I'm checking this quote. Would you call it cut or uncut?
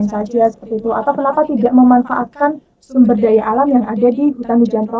uncut